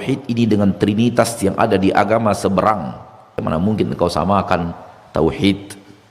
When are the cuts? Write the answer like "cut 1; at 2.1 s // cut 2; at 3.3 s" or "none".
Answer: cut 1; at 3.4 s